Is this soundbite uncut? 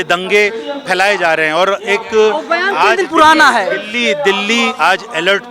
yes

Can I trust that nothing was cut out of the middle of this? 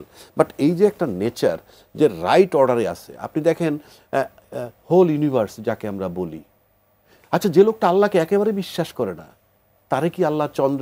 yes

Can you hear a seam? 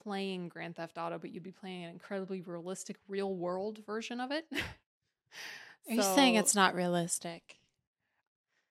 no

